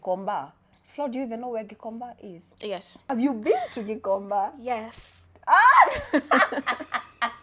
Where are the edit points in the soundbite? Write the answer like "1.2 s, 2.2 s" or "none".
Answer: none